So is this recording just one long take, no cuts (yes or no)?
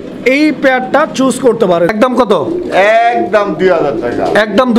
no